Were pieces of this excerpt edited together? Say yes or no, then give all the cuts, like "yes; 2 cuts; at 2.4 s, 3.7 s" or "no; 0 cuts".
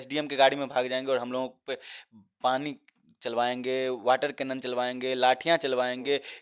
no; 0 cuts